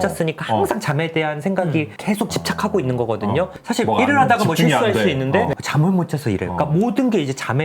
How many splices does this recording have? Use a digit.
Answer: 1